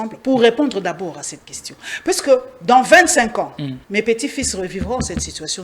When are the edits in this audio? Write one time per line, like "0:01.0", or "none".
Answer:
0:03.8